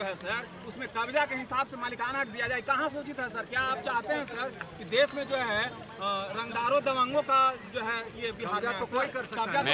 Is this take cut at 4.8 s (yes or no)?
no